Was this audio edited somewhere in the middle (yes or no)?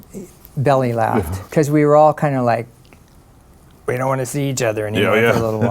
yes